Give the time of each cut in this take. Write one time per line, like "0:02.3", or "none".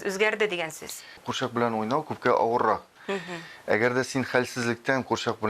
0:01.2